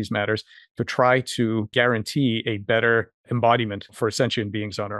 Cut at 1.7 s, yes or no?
yes